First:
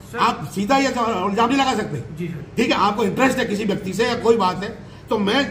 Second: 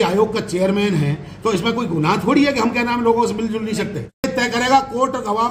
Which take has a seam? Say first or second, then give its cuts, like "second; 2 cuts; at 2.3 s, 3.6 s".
second; 1 cut; at 4.3 s